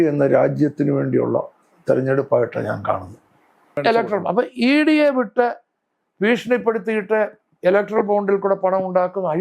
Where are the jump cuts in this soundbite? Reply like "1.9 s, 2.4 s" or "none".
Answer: 3.8 s